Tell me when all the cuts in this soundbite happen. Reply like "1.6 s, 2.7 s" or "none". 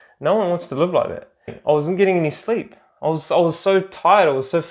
1.5 s